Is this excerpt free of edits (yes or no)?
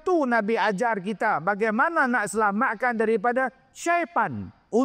yes